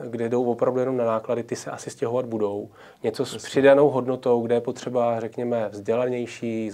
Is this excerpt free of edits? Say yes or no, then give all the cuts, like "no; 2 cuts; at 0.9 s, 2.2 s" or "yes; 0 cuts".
yes; 0 cuts